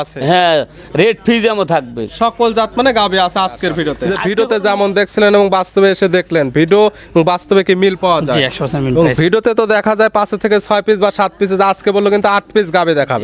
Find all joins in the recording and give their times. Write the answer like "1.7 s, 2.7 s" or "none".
4.1 s